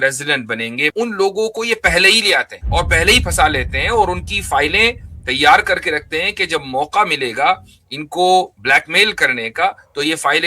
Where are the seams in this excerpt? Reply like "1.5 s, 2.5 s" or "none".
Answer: 0.9 s, 2.6 s